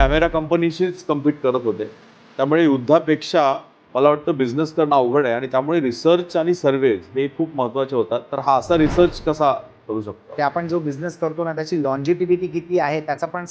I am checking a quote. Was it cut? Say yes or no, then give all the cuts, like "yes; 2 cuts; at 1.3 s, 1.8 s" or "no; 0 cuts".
yes; 2 cuts; at 8.3 s, 10.3 s